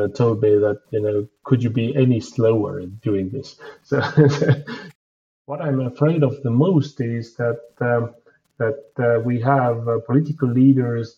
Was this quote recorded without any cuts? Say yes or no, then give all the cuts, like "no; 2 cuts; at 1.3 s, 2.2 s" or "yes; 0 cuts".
no; 1 cut; at 5.0 s